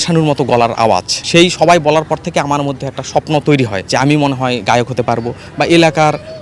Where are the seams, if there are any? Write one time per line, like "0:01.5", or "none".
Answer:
0:01.1